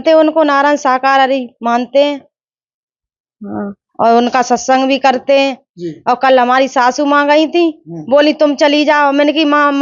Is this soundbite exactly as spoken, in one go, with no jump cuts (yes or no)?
yes